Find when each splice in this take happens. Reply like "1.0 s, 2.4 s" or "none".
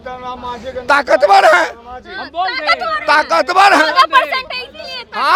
none